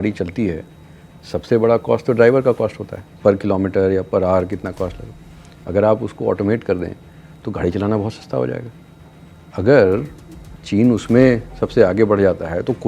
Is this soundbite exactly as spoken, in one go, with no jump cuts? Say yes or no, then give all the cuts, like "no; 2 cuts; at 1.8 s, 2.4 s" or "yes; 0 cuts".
yes; 0 cuts